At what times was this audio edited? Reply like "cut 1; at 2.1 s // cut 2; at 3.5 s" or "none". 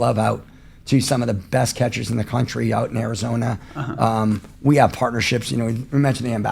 none